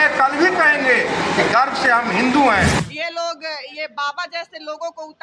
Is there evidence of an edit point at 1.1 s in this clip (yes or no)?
no